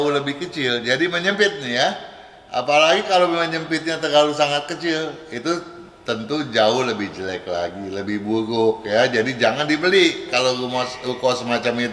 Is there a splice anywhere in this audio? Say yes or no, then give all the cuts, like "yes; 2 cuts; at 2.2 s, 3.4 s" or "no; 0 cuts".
no; 0 cuts